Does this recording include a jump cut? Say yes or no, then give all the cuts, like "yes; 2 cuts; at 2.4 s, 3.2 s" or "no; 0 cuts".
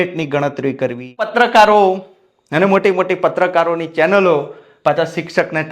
yes; 1 cut; at 1.3 s